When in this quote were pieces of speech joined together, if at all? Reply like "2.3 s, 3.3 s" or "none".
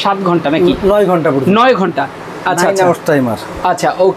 none